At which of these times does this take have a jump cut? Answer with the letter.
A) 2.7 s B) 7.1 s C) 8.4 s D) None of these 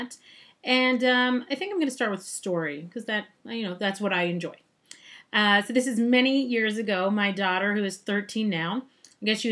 A